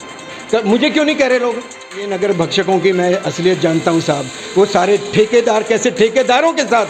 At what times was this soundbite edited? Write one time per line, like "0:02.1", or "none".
0:02.1